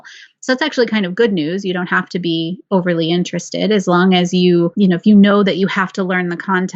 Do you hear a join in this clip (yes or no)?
yes